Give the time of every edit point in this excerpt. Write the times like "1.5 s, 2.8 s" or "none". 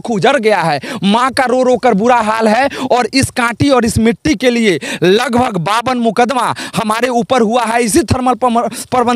none